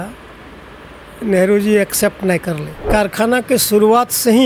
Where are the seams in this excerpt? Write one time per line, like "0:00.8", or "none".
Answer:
0:02.9